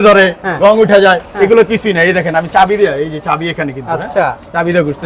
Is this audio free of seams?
yes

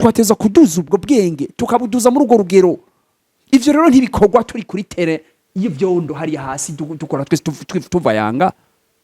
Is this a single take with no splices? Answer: yes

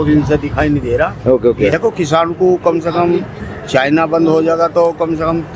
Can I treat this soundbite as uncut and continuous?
no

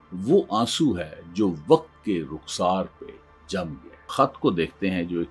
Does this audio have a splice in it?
yes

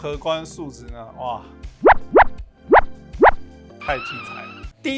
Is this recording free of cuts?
yes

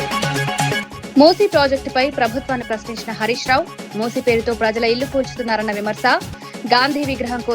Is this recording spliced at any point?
yes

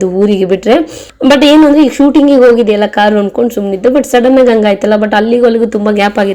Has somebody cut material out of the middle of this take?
no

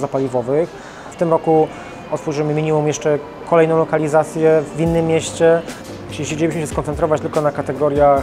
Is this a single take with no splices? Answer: no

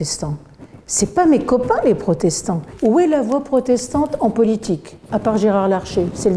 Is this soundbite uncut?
no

